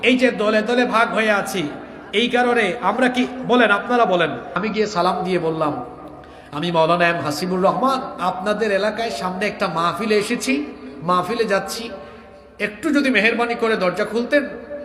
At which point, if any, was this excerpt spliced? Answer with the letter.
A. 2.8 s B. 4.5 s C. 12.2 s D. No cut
B